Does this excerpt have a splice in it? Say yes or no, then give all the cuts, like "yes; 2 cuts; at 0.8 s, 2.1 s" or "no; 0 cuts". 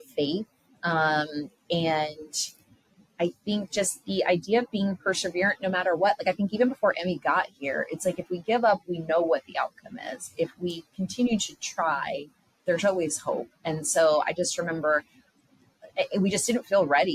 no; 0 cuts